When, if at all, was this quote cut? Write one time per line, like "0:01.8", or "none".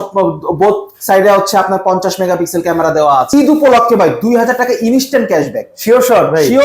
0:03.3

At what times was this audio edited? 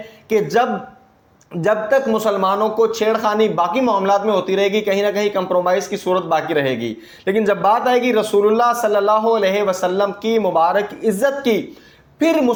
none

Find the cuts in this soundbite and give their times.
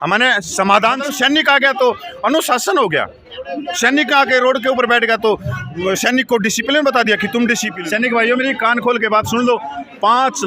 0:01.0
0:07.7

